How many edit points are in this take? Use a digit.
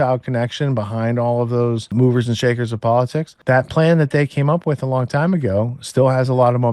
2